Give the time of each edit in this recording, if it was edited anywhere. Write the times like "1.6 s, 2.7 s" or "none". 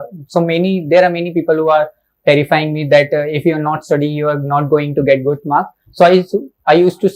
none